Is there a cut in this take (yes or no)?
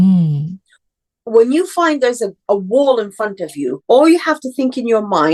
yes